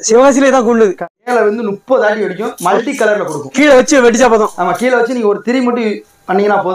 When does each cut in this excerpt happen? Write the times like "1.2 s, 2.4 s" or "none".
1.3 s